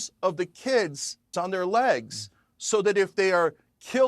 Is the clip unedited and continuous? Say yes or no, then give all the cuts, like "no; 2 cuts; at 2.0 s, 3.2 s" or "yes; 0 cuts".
no; 1 cut; at 1.3 s